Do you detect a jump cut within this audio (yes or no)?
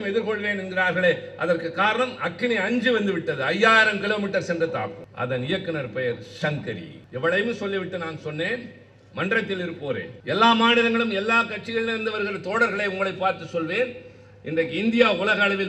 yes